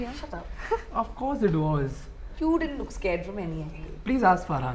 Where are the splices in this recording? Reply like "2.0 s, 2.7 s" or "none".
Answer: none